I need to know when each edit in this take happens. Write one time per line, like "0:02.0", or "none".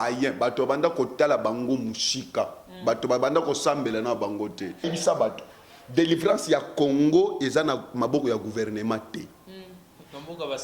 0:04.9